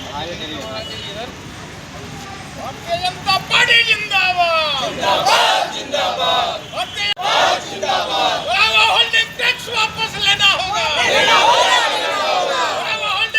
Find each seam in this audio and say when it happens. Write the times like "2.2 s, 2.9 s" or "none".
7.0 s

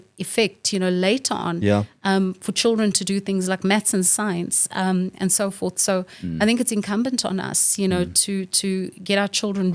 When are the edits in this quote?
none

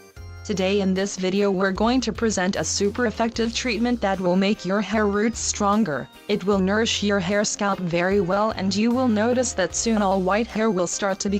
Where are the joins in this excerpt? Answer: 3.9 s

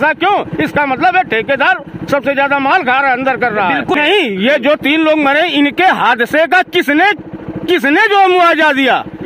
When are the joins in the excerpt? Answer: 4.0 s

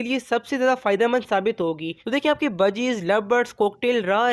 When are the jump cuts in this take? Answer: 2.0 s

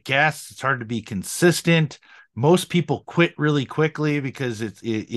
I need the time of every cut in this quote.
none

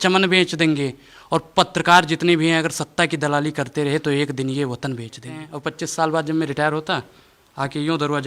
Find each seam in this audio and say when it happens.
5.5 s

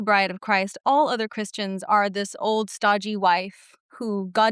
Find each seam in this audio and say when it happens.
none

